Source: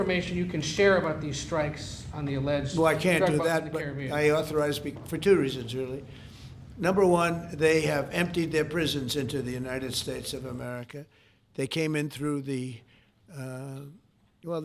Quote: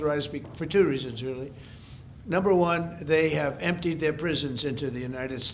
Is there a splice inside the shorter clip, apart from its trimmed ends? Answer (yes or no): no